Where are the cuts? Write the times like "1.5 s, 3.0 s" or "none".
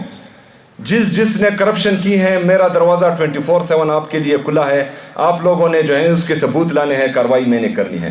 none